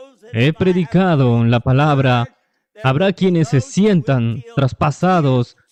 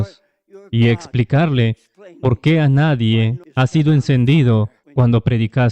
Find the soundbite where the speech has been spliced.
second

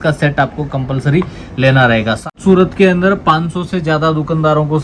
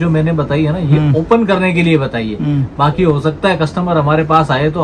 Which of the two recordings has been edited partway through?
first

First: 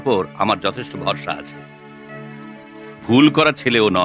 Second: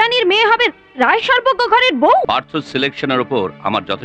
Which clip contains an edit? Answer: second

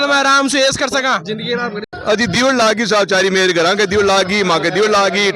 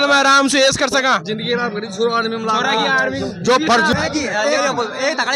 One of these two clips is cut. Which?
first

